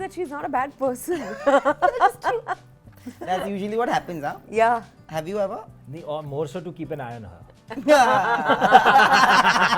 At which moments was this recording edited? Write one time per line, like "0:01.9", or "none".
none